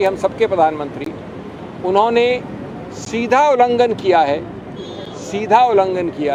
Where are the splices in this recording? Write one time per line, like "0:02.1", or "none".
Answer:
none